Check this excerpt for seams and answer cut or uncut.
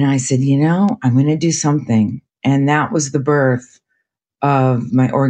uncut